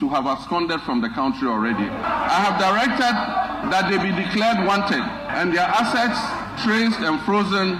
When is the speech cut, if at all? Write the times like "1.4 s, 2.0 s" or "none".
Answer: none